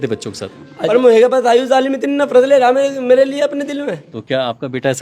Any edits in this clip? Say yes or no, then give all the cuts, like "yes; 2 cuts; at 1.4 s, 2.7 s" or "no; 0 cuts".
yes; 2 cuts; at 0.9 s, 4.1 s